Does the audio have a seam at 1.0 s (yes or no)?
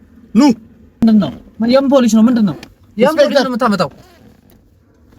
yes